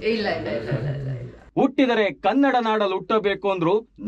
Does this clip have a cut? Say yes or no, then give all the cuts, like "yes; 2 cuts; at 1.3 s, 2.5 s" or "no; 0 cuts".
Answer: yes; 1 cut; at 1.4 s